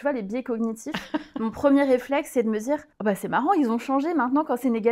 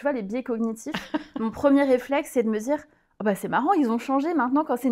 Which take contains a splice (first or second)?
first